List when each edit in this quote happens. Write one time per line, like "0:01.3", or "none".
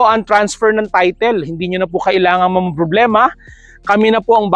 none